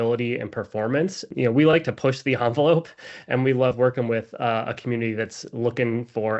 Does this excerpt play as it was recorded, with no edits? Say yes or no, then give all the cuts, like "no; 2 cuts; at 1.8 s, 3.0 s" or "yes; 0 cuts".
no; 1 cut; at 1.2 s